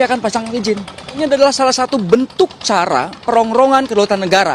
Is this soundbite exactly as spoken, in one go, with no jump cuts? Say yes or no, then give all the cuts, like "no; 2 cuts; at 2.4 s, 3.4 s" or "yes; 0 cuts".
no; 1 cut; at 1.2 s